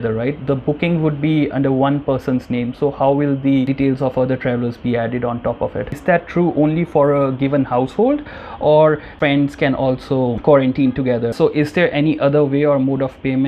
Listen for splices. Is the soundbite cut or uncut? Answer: cut